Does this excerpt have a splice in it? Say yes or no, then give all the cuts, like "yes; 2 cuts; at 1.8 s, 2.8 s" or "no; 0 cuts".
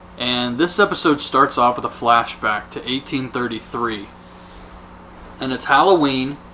no; 0 cuts